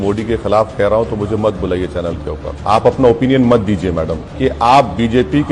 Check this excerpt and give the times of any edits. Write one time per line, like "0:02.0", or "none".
0:02.6
0:04.2